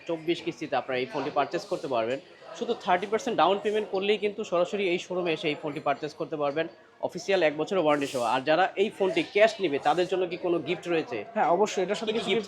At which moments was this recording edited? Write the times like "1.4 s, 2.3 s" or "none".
none